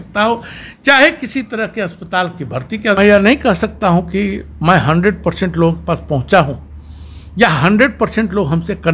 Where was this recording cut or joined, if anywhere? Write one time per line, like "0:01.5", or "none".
0:03.0